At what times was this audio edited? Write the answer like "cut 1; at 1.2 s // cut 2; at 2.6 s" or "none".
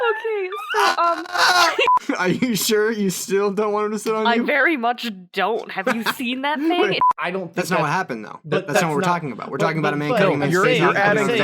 cut 1; at 2.0 s // cut 2; at 7.0 s